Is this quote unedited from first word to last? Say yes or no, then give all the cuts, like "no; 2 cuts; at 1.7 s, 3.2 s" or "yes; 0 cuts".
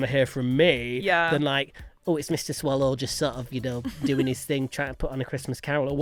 yes; 0 cuts